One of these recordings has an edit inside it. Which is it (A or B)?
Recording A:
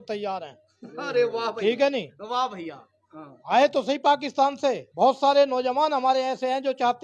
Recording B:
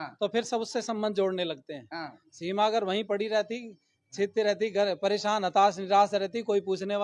A